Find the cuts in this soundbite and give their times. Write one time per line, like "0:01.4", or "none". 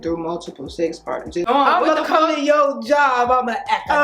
0:01.5